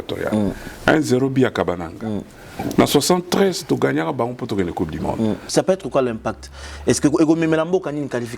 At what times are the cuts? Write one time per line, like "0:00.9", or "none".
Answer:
0:05.5